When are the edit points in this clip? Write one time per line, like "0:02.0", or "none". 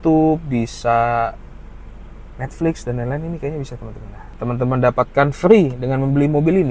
0:04.3